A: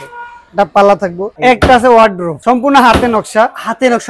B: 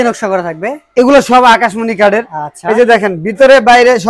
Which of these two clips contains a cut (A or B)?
A